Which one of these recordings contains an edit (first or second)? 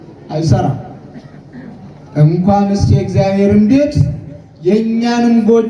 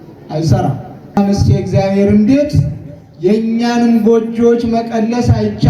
second